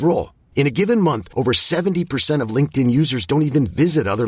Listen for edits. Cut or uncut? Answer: uncut